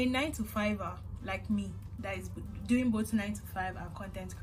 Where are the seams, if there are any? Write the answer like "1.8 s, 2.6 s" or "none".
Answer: none